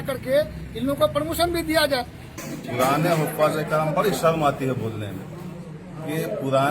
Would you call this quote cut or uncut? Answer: cut